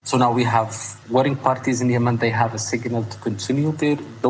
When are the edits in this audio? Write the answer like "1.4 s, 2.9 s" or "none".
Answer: 1.0 s